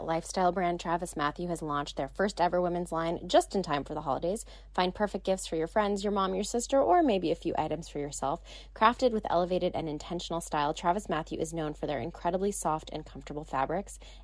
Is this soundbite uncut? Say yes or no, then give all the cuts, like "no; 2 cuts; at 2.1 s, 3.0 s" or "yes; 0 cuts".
yes; 0 cuts